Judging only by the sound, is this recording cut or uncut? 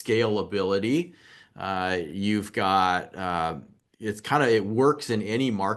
uncut